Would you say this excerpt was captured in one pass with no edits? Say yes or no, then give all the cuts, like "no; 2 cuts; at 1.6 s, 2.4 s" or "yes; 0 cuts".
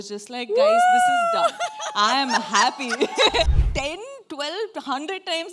no; 1 cut; at 3.6 s